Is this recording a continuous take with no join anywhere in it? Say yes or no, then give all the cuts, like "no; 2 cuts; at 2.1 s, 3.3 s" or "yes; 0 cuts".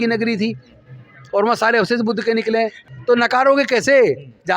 no; 1 cut; at 2.9 s